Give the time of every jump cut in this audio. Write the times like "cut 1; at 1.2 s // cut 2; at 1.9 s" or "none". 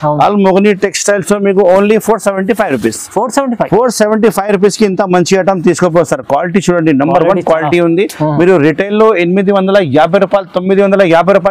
none